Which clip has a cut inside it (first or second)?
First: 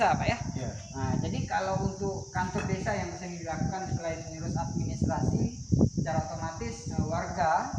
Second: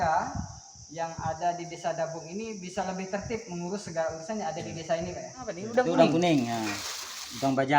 second